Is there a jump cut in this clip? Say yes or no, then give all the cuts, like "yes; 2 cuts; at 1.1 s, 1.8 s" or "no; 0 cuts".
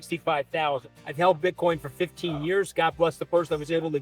yes; 1 cut; at 1.0 s